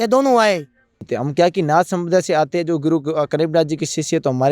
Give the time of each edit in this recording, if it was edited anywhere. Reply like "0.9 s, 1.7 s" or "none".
1.2 s